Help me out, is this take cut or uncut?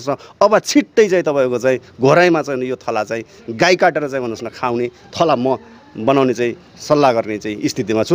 uncut